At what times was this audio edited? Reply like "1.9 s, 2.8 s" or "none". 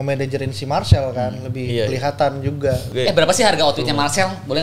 2.9 s